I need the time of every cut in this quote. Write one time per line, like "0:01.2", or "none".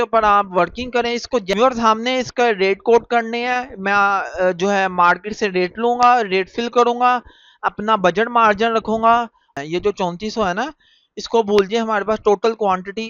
0:01.5
0:09.4